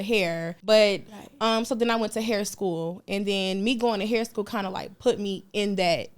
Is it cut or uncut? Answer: cut